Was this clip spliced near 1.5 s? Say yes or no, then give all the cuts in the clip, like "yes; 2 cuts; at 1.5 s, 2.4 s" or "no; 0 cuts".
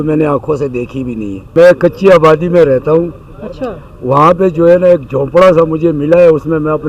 yes; 1 cut; at 1.5 s